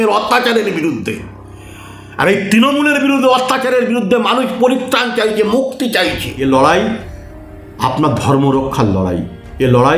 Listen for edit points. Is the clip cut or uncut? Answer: cut